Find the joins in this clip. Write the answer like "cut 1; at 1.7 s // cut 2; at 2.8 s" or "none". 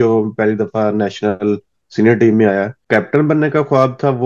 cut 1; at 2.7 s